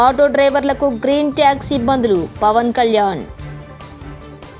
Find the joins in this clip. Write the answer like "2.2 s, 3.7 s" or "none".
none